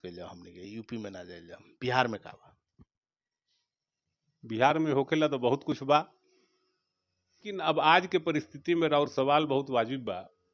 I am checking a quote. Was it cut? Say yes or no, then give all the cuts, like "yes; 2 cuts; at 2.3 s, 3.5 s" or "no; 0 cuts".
yes; 1 cut; at 7.5 s